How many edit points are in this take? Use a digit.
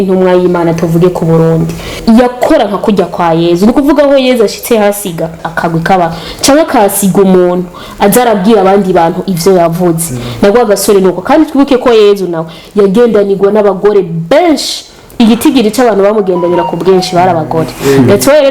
2